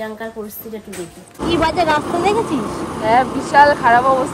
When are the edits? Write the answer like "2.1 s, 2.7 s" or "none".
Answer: 1.4 s